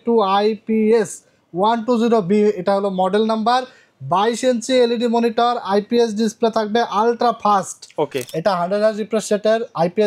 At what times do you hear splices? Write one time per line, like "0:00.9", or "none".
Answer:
0:08.2